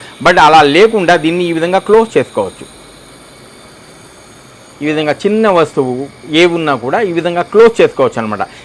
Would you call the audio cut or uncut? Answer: uncut